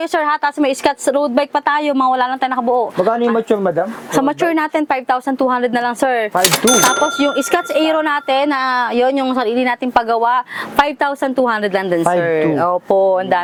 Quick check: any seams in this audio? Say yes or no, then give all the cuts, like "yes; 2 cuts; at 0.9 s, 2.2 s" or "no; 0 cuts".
no; 0 cuts